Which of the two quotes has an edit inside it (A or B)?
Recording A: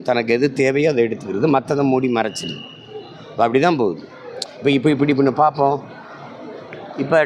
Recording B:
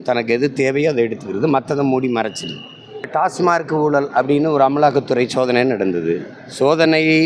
B